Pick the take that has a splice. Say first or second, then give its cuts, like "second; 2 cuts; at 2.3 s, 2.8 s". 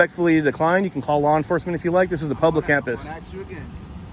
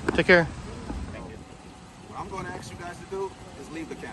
second; 1 cut; at 1.3 s